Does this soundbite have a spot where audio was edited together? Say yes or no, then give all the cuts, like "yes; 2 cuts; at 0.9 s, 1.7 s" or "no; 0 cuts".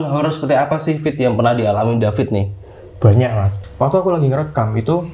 yes; 1 cut; at 3.5 s